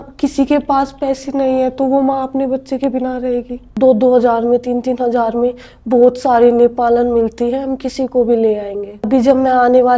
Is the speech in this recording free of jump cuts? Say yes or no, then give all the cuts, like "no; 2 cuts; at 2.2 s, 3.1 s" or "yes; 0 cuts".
no; 2 cuts; at 3.8 s, 9.1 s